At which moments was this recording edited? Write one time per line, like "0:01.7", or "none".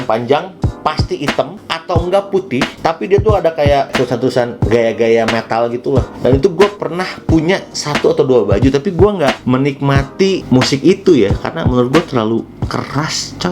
0:06.1
0:09.4
0:10.4

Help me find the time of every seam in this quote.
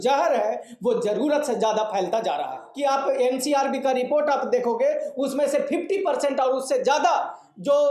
0:02.7

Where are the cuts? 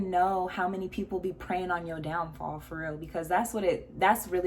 none

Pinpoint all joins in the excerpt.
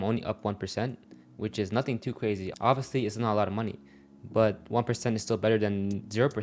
none

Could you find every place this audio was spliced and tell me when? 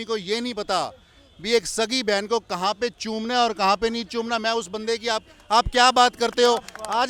none

